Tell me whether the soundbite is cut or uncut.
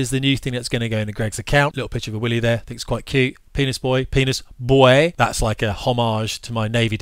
cut